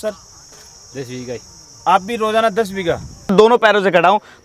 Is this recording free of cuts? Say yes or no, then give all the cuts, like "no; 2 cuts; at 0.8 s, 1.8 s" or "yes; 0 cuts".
no; 1 cut; at 3.3 s